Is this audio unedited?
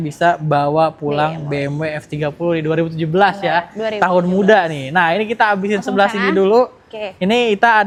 yes; 0 cuts

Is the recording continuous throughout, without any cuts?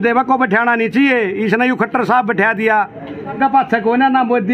no; 1 cut; at 3.4 s

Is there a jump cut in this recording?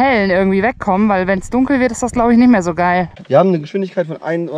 yes; 1 cut; at 3.2 s

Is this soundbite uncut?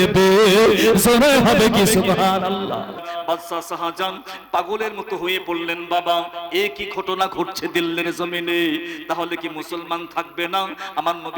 no; 1 cut; at 3.0 s

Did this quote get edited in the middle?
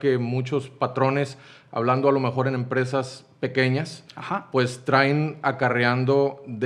no; 0 cuts

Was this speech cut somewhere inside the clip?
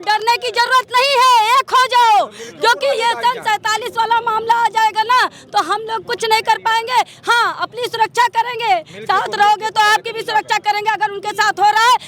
no; 0 cuts

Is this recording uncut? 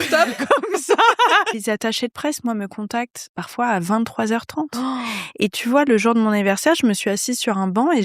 no; 1 cut; at 1.5 s

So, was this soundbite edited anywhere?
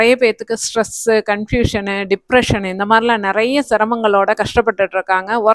no; 0 cuts

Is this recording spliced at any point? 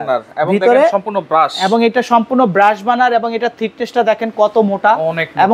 no; 0 cuts

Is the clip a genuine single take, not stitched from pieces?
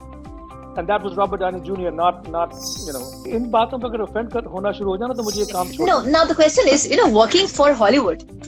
no; 2 cuts; at 3.2 s, 5.7 s

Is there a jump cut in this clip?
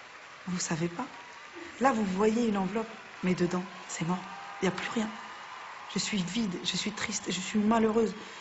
no; 0 cuts

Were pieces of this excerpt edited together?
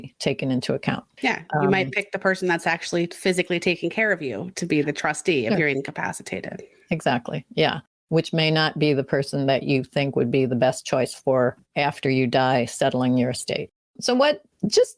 no; 0 cuts

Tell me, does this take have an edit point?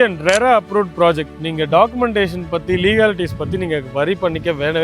no; 0 cuts

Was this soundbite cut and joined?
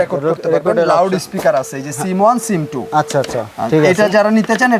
no; 0 cuts

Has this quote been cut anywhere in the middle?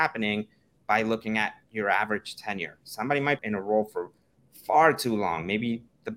yes; 1 cut; at 3.4 s

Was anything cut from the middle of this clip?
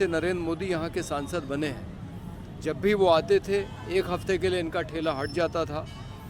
no; 0 cuts

